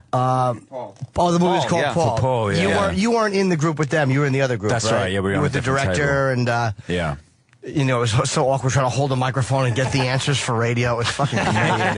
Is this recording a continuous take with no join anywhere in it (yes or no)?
no